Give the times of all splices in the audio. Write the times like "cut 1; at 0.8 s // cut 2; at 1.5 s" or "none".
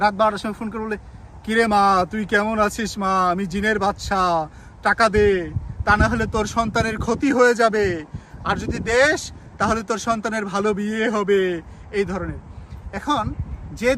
none